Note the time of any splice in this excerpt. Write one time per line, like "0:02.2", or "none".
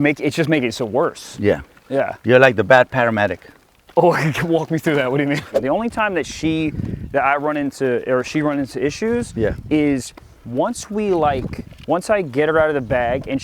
0:05.5

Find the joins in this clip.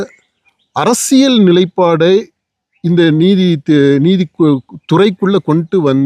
none

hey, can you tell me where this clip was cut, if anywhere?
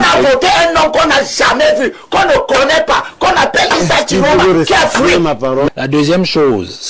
0:05.7

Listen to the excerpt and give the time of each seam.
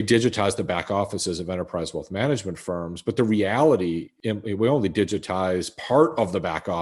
0:04.1

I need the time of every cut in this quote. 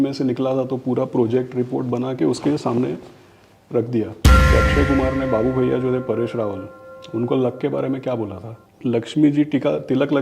0:04.5
0:08.8

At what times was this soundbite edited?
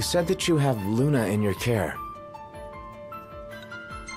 0:01.9

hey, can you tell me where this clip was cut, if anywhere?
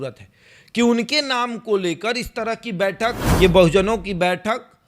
0:03.2

